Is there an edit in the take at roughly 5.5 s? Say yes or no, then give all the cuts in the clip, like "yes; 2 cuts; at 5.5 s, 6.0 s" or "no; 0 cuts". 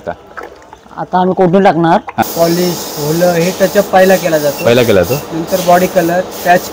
no; 1 cut; at 2.2 s